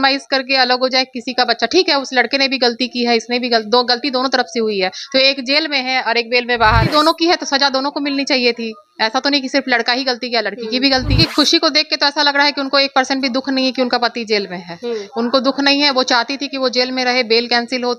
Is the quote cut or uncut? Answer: cut